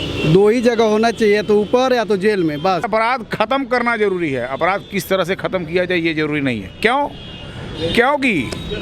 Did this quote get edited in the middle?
yes; 1 cut; at 2.9 s

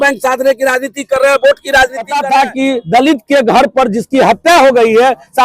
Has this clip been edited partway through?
yes; 1 cut; at 2.2 s

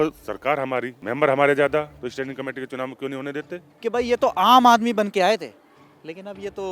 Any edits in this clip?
yes; 3 cuts; at 1.0 s, 2.0 s, 3.7 s

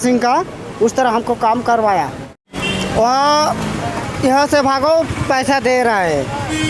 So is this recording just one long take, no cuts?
no; 1 cut; at 2.5 s

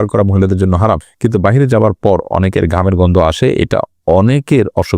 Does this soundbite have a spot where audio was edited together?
yes; 1 cut; at 1.1 s

